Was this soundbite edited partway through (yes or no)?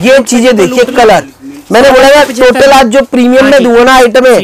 no